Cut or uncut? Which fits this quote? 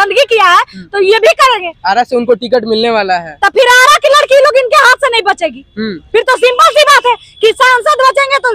uncut